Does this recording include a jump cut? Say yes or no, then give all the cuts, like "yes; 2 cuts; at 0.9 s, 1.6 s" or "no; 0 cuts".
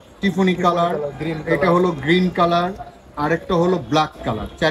no; 0 cuts